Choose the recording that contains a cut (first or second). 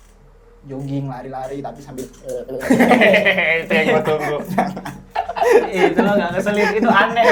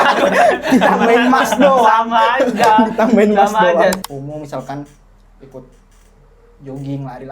second